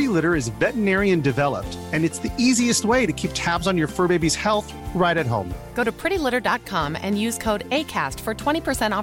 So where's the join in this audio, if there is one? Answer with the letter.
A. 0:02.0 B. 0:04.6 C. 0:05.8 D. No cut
D